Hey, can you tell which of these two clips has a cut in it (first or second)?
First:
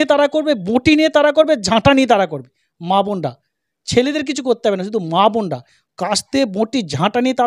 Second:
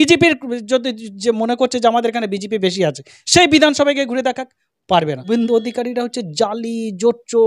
second